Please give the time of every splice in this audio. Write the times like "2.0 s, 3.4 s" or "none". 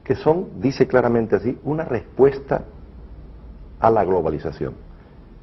2.6 s